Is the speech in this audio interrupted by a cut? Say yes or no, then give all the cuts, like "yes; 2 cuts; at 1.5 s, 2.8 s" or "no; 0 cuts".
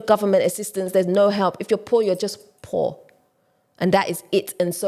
no; 0 cuts